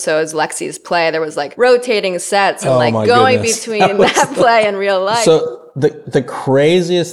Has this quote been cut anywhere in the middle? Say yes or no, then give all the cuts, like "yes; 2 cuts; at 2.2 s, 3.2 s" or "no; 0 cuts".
yes; 3 cuts; at 1.5 s, 2.6 s, 5.2 s